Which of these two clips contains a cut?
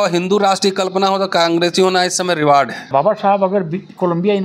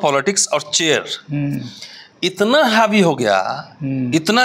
first; 1 cut; at 2.9 s

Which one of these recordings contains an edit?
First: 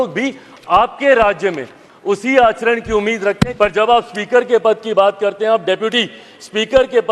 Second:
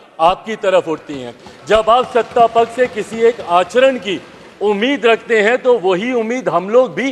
first; 1 cut; at 3.5 s

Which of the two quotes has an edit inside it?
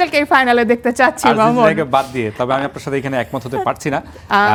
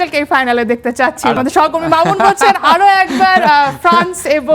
second; 1 cut; at 1.4 s

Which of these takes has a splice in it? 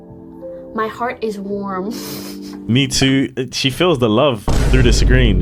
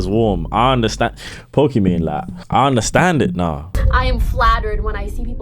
second; 2 cuts; at 2.3 s, 3.8 s

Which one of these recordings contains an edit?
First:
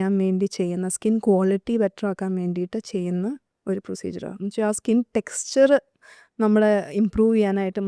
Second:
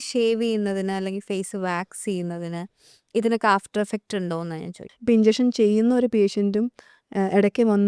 second; 1 cut; at 4.8 s

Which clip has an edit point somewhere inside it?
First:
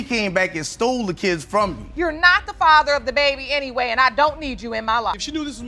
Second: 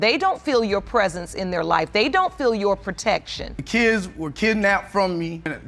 first; 1 cut; at 2.0 s

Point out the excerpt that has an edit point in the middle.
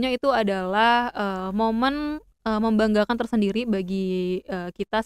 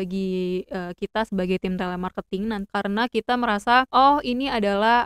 second; 2 cuts; at 2.7 s, 3.9 s

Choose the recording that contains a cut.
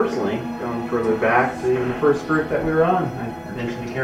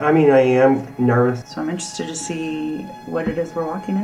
second; 1 cut; at 1.4 s

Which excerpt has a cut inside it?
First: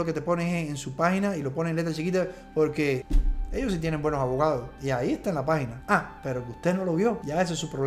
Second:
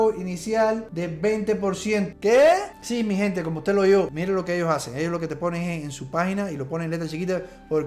second; 1 cut; at 4.1 s

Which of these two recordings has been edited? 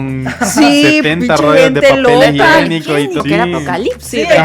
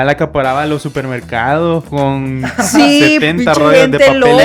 first; 1 cut; at 3.2 s

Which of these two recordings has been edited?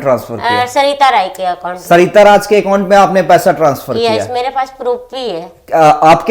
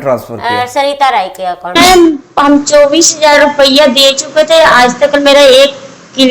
second; 1 cut; at 1.8 s

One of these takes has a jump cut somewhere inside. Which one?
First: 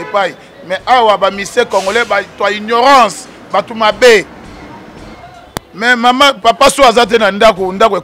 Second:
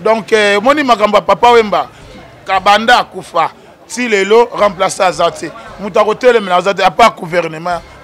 first; 1 cut; at 5.1 s

